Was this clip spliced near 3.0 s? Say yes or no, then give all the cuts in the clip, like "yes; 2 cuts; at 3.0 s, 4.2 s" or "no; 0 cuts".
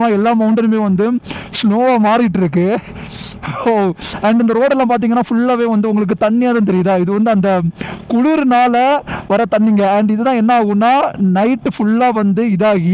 no; 0 cuts